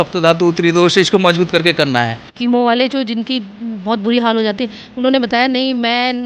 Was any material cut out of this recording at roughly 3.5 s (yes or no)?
no